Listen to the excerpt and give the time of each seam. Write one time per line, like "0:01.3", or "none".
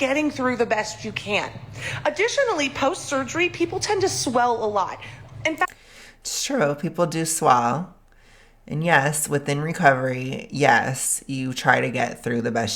none